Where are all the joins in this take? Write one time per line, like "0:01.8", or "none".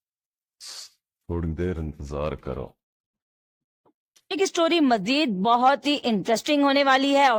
none

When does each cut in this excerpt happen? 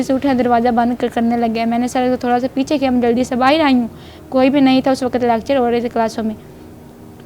none

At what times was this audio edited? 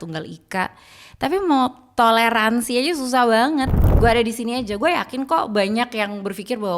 0:03.8

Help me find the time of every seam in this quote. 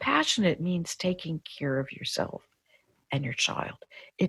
0:02.8

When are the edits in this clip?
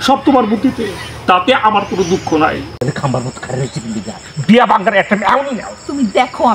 0:02.7

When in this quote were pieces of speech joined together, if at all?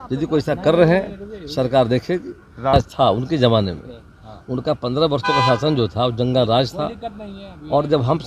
0:02.7

